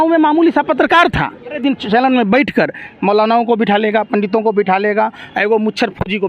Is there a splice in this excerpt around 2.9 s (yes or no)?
no